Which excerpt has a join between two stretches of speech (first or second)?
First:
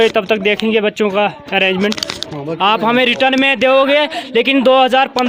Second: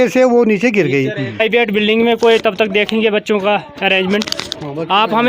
second